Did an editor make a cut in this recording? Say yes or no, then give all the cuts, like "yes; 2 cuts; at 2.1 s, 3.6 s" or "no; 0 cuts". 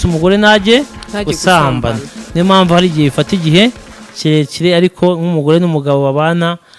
no; 0 cuts